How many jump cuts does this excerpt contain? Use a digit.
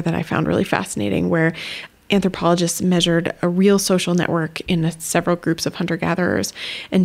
1